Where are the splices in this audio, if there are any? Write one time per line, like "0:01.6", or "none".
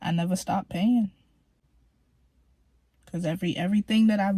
none